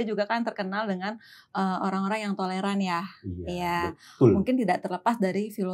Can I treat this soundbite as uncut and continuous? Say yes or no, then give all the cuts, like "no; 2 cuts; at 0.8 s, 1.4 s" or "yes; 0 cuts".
yes; 0 cuts